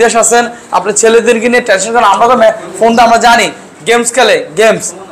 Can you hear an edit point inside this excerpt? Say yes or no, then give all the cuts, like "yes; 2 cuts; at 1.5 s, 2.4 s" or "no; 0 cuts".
no; 0 cuts